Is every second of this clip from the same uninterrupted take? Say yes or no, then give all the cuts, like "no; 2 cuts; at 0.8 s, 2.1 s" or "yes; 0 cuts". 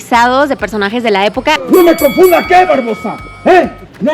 no; 1 cut; at 1.6 s